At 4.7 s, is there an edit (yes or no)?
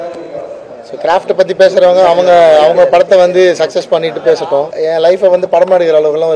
yes